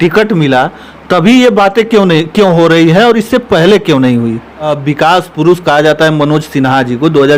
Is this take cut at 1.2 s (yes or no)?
no